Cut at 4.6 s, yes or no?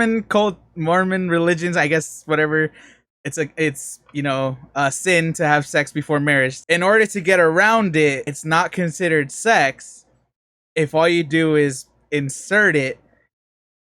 no